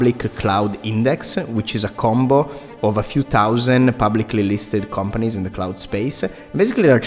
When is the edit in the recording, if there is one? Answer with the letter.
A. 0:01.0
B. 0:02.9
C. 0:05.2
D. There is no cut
D